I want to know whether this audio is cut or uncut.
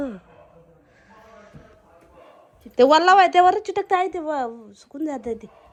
uncut